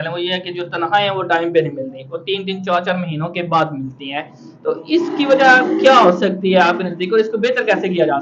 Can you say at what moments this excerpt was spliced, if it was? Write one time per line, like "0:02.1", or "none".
none